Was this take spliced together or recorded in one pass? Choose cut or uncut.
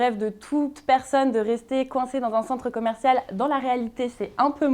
uncut